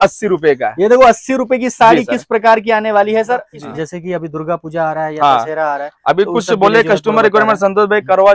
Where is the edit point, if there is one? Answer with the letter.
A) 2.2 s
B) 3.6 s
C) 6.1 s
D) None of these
B